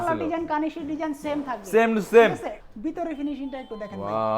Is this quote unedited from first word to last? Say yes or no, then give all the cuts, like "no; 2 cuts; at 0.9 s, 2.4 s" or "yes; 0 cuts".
no; 1 cut; at 2.6 s